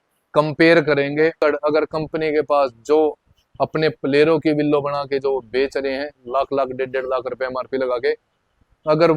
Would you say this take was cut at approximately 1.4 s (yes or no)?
yes